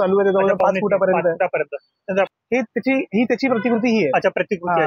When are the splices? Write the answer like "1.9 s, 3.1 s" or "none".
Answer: 2.3 s